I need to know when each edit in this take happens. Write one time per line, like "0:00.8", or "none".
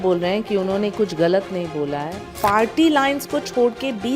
0:02.3